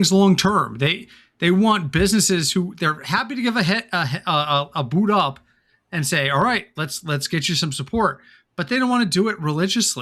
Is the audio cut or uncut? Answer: uncut